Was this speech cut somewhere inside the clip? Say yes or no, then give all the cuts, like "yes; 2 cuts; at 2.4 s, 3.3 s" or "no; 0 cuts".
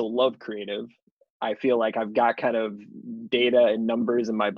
no; 0 cuts